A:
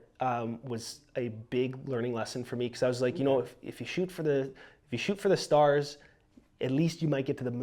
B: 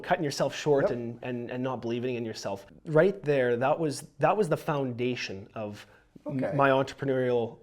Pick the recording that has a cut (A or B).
B